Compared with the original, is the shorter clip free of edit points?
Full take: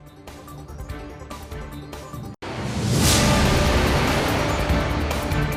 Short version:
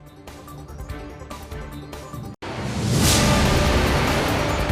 yes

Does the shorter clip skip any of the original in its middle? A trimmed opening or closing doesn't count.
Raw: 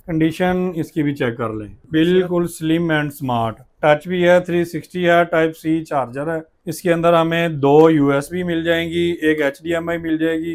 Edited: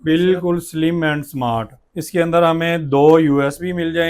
yes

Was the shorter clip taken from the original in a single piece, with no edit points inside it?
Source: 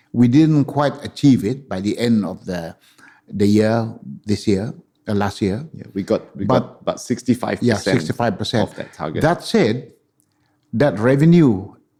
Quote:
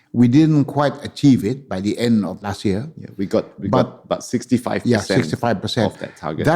no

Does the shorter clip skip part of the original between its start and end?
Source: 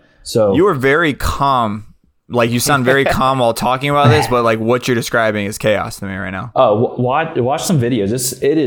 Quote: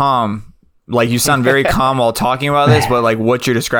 no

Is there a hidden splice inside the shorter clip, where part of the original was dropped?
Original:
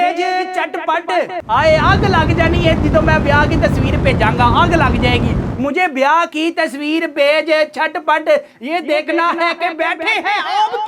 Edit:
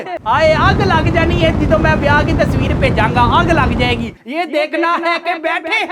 yes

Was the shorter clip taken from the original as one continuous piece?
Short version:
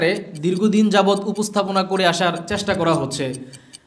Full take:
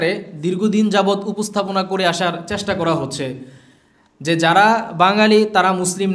yes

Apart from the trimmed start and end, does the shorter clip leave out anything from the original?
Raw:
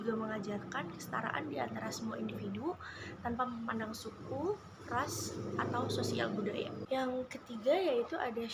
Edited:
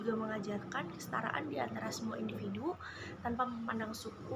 no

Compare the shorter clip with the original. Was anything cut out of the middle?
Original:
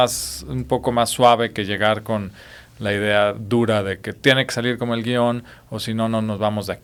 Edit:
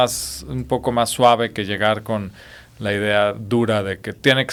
no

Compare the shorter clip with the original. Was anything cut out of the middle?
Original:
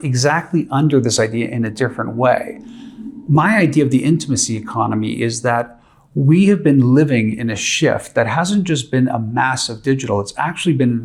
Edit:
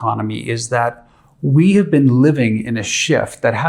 no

